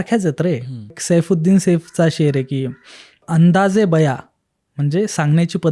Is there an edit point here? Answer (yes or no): yes